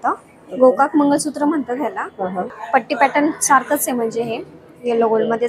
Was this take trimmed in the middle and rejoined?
yes; 1 cut; at 2.5 s

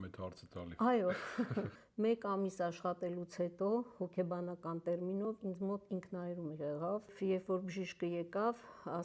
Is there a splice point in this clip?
yes; 2 cuts; at 1.8 s, 7.1 s

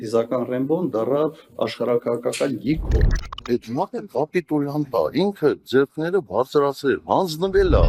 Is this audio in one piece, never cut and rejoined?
yes; 0 cuts

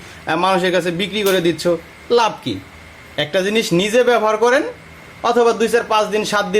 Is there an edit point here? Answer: no; 0 cuts

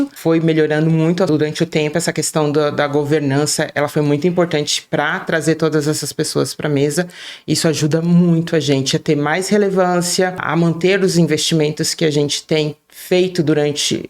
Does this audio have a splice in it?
yes; 1 cut; at 1.3 s

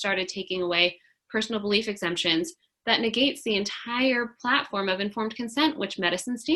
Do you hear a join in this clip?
no; 0 cuts

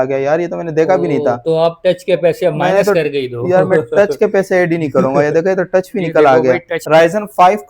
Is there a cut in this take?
yes; 1 cut; at 6.7 s

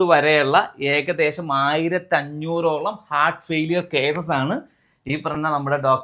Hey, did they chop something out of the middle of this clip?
no; 0 cuts

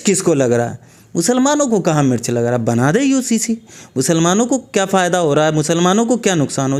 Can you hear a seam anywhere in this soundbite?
no; 0 cuts

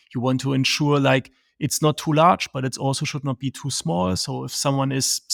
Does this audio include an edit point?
no; 0 cuts

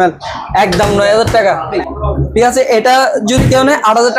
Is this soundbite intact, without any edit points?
no; 1 cut; at 1.8 s

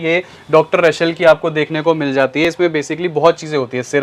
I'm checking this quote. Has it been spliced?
no; 0 cuts

